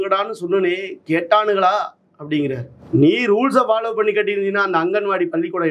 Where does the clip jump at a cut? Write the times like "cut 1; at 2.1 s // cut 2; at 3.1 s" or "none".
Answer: cut 1; at 2.7 s